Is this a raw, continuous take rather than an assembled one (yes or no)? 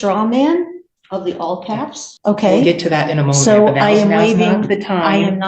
no